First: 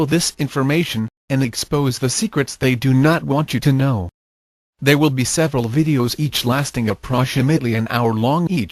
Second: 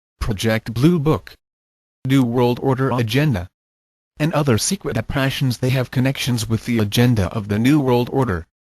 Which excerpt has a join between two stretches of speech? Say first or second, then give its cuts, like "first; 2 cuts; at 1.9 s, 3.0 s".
second; 1 cut; at 1.0 s